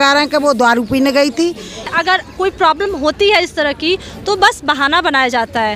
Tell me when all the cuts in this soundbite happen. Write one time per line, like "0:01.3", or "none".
0:01.9